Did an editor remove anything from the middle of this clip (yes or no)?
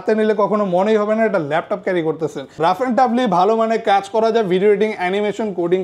yes